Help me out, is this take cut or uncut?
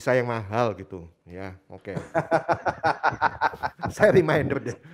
uncut